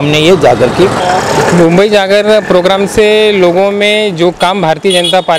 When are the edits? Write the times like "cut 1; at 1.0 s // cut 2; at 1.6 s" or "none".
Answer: cut 1; at 1.0 s